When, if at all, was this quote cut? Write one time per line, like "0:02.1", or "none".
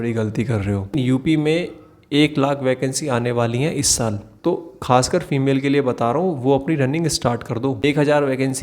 0:00.9
0:04.3
0:07.8